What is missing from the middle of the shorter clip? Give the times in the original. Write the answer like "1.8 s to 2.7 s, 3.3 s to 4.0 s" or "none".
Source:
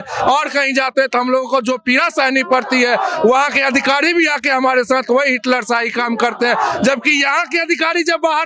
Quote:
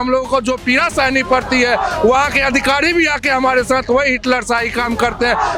none

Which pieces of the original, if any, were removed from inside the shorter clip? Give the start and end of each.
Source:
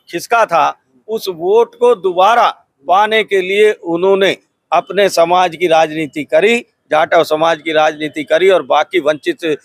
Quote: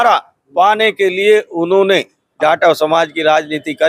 4.5 s to 6.7 s

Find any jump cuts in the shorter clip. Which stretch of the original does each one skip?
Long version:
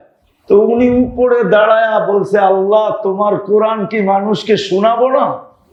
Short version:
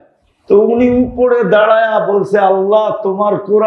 none

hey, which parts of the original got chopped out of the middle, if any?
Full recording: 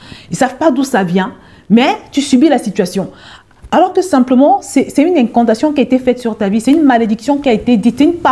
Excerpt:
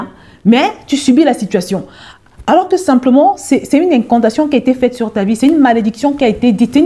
none

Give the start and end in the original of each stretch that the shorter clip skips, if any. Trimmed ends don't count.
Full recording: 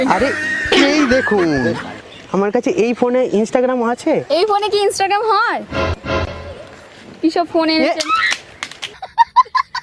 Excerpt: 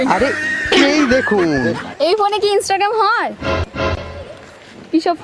1.9 s to 4.2 s

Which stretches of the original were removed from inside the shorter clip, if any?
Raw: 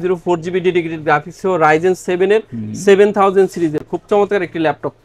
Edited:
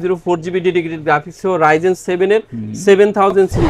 none

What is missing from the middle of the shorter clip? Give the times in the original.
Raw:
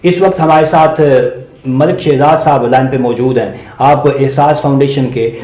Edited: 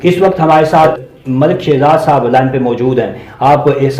0.9 s to 1.3 s

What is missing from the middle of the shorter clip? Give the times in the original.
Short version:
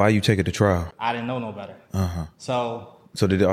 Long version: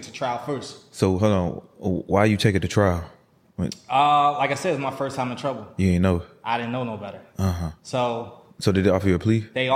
3.1 s to 6.4 s

